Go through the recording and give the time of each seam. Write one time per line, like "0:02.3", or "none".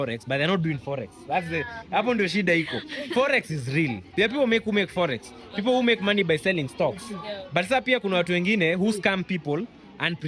none